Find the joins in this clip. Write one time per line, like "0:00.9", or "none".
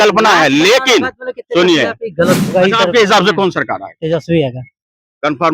0:02.5